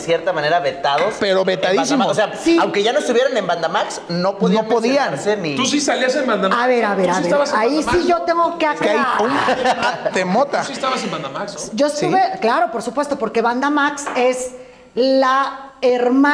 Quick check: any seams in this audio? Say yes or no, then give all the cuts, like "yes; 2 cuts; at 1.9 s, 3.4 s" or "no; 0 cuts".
no; 0 cuts